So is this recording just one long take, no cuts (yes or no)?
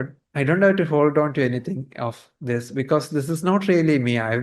yes